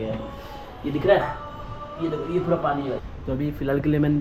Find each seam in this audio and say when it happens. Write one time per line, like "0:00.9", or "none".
0:03.0